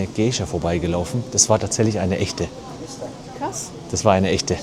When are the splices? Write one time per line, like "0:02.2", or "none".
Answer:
none